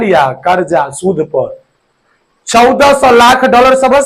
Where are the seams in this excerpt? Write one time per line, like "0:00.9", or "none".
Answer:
none